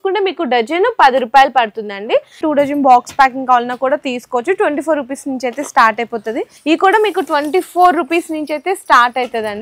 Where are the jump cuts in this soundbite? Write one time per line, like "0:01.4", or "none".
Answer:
0:02.4
0:06.5